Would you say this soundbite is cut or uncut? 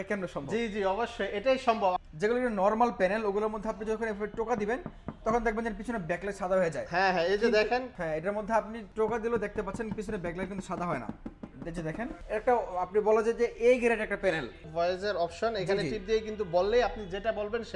cut